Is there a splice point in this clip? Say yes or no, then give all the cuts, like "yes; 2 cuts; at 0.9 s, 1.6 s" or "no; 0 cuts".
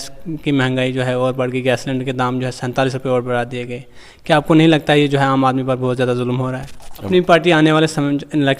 yes; 1 cut; at 7.0 s